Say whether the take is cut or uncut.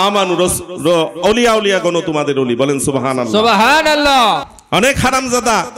cut